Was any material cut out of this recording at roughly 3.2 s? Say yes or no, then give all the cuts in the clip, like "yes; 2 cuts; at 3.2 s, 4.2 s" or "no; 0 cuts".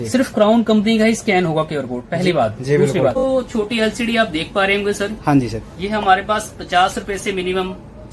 yes; 1 cut; at 3.2 s